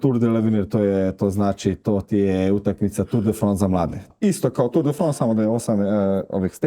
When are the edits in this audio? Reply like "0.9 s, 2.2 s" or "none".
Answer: 4.1 s